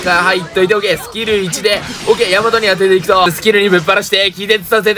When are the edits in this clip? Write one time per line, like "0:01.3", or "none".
0:03.3